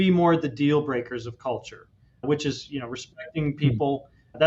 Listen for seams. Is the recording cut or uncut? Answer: uncut